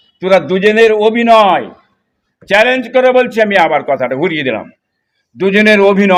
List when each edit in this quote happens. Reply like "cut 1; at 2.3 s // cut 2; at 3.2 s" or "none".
none